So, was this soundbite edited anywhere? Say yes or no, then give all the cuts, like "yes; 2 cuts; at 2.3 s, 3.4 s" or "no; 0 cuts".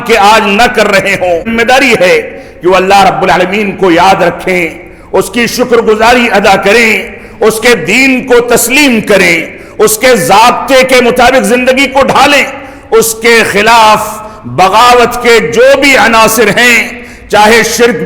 yes; 1 cut; at 1.5 s